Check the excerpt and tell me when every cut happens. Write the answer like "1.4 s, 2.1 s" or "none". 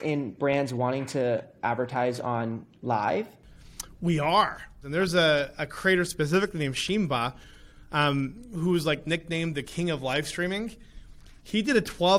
4.8 s

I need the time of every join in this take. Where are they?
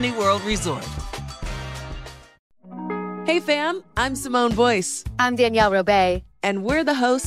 2.3 s

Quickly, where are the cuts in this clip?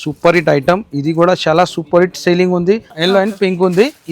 2.9 s

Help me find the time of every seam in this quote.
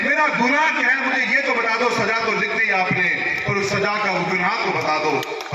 none

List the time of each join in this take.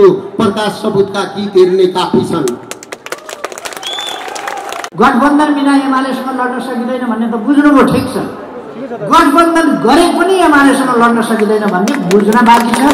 4.8 s

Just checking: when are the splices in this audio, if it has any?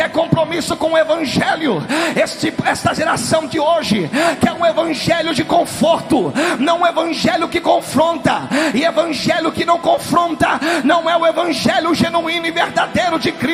none

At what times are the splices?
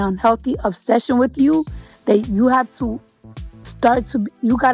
3.1 s

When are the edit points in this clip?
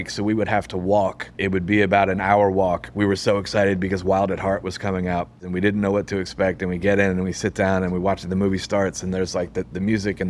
1.4 s, 2.9 s, 5.4 s

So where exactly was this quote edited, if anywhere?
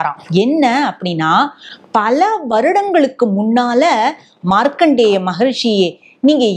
none

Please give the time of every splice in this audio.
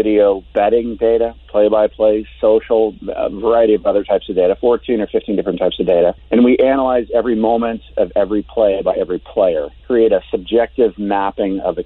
6.2 s, 9.7 s

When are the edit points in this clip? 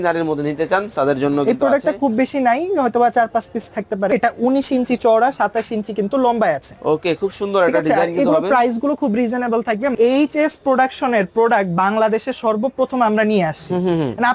4.1 s, 9.9 s

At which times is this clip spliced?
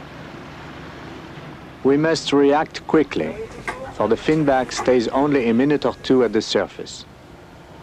5.6 s

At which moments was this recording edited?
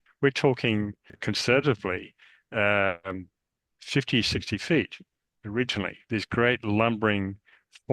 1.1 s

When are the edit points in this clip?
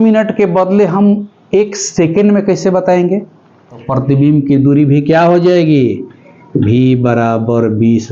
3.8 s

